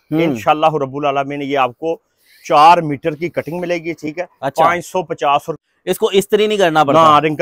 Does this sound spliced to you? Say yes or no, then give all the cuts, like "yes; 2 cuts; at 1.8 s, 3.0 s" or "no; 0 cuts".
yes; 1 cut; at 5.5 s